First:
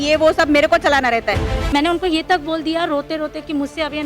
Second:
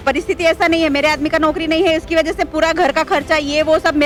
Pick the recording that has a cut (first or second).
first